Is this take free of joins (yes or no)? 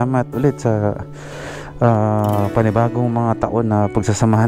yes